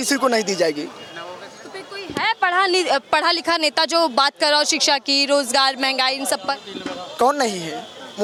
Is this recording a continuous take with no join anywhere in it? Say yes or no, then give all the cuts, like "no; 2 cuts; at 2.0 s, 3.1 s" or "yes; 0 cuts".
yes; 0 cuts